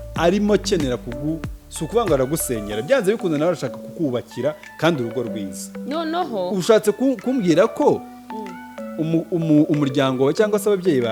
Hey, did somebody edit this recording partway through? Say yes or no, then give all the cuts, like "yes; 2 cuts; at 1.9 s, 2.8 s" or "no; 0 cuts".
no; 0 cuts